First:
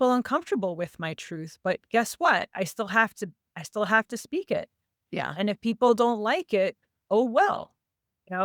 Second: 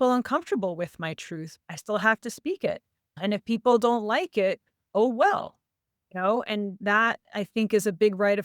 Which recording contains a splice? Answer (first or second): second